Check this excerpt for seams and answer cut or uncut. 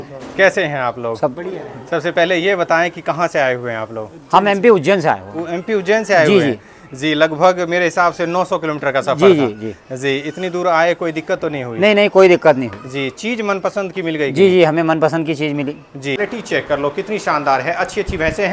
cut